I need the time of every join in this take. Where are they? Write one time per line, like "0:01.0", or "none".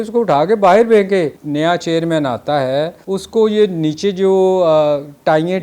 0:01.4
0:03.0